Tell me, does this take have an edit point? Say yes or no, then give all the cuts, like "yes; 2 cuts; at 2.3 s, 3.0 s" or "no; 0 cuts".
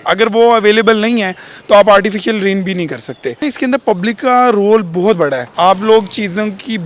yes; 2 cuts; at 3.4 s, 5.5 s